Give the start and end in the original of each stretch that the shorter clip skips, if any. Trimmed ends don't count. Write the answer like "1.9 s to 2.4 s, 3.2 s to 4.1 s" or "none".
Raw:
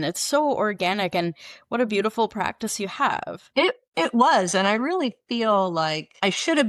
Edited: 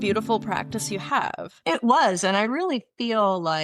3.4 s to 3.8 s